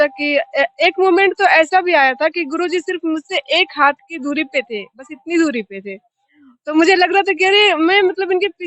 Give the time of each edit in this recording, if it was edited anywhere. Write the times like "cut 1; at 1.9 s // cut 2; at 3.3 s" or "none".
none